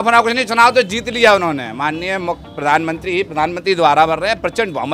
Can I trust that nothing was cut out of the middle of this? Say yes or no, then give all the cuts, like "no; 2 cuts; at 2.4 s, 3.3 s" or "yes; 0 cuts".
yes; 0 cuts